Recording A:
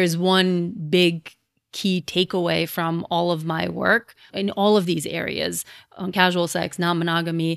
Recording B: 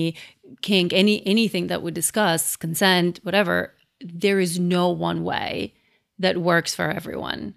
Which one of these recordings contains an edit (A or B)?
A